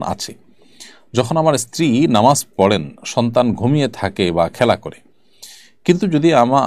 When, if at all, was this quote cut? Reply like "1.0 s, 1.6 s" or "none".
none